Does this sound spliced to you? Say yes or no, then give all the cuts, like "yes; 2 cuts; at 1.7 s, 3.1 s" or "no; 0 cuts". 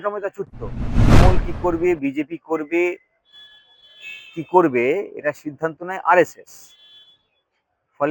yes; 1 cut; at 1.1 s